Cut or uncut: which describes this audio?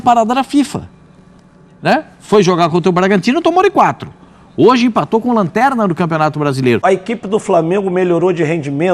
cut